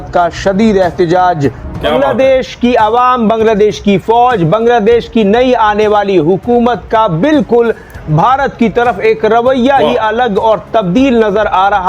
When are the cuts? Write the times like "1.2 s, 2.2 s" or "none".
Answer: 1.8 s